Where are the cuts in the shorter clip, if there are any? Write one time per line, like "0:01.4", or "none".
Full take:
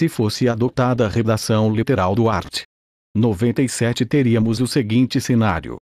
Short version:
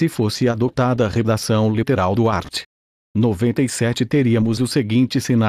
none